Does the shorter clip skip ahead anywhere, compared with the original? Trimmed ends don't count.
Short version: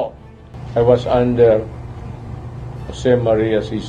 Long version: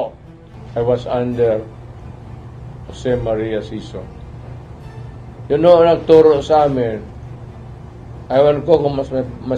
no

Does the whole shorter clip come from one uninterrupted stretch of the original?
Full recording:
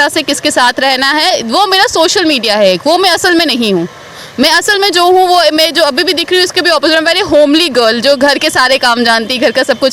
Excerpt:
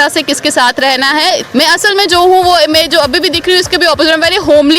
no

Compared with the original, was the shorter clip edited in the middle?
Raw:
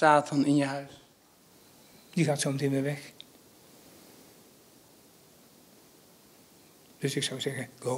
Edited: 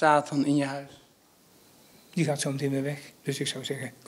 yes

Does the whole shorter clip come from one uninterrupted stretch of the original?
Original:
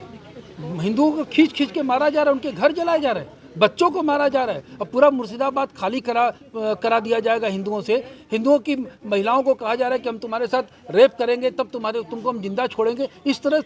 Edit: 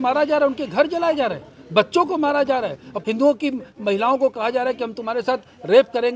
no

